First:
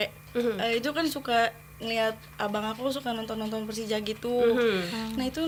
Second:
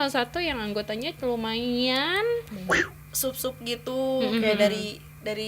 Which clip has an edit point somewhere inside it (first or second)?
second